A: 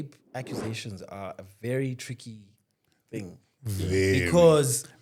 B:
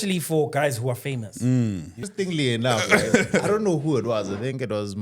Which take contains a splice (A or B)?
B